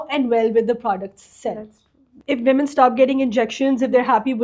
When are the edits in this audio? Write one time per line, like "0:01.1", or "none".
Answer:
0:02.1